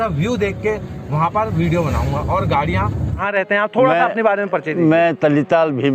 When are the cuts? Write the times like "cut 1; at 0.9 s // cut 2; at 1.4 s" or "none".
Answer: cut 1; at 3.2 s